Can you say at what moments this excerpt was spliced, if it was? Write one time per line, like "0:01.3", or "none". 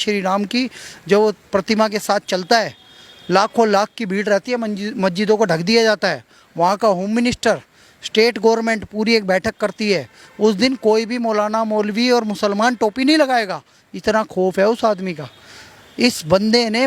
none